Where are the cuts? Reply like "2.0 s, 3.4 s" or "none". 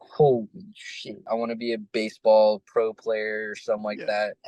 1.2 s

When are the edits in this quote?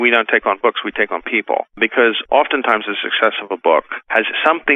1.8 s

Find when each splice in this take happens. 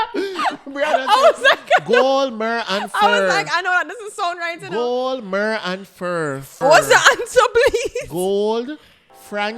6.5 s

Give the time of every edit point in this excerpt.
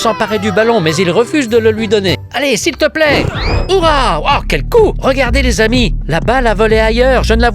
2.2 s

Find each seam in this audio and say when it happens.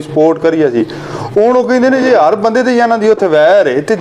none

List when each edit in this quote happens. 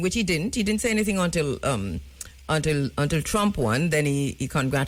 none

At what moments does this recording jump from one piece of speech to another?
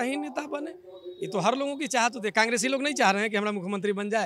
none

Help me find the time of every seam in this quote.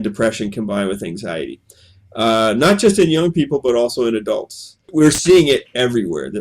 4.9 s

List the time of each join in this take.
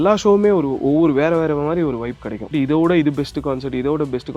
2.5 s

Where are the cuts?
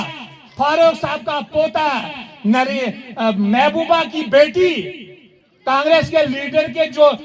none

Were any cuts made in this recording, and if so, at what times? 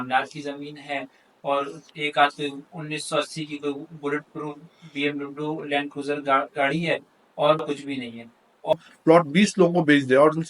8.7 s

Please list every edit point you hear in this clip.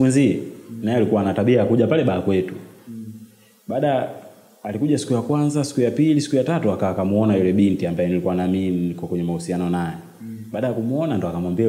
none

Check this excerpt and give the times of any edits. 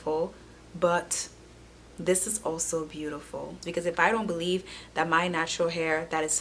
3.6 s

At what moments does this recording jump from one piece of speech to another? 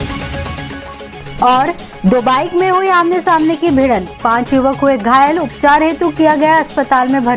1.1 s

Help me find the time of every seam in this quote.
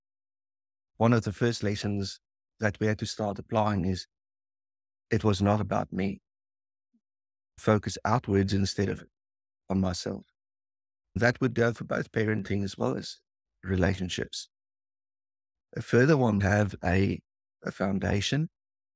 0.9 s, 7.6 s, 11.2 s, 16.4 s

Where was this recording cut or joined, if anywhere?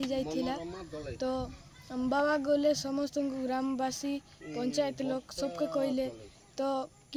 none

